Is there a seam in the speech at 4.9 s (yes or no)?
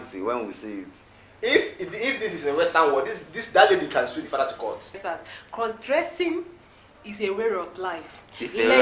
yes